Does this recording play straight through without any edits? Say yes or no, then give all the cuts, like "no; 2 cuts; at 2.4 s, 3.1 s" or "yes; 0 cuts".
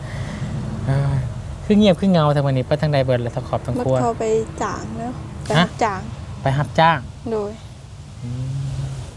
yes; 0 cuts